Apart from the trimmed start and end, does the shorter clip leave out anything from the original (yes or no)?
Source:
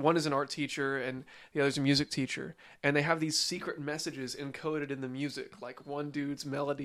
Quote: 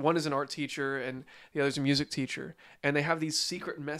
no